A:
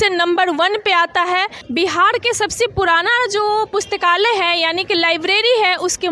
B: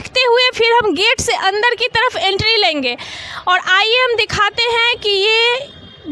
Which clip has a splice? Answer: A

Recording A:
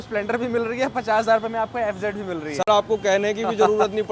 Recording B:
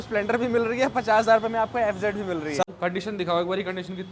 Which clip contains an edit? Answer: B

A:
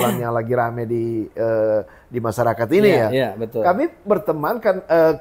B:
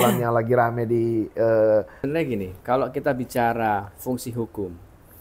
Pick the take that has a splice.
B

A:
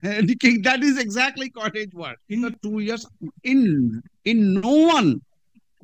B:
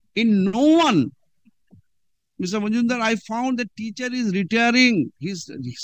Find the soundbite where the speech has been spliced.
A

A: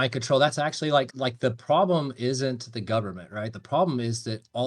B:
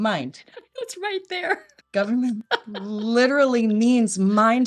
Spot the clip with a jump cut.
A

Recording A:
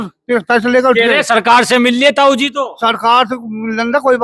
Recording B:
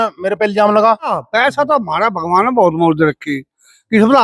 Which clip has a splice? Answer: B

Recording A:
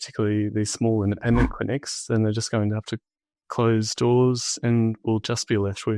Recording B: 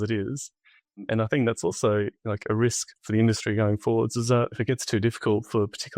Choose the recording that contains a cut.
B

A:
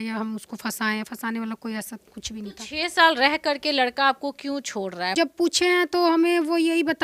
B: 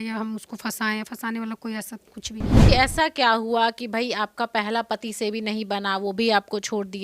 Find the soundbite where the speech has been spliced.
B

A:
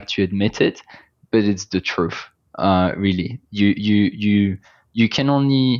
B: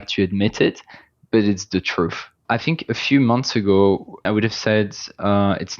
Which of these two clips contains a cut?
B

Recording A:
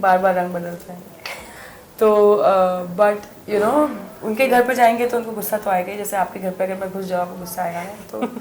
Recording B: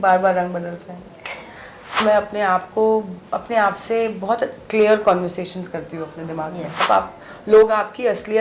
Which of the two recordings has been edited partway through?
B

